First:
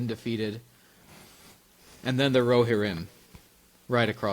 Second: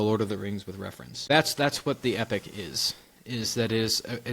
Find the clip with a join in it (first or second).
second